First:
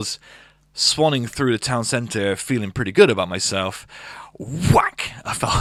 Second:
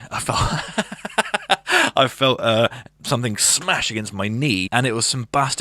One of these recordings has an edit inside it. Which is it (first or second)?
second